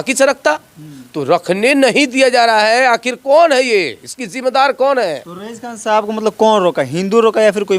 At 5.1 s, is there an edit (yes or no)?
no